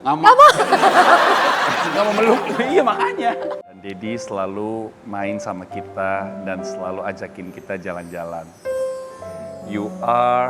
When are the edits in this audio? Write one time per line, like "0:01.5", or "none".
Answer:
0:03.6